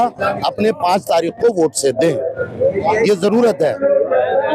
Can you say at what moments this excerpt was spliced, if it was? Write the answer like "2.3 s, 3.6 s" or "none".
none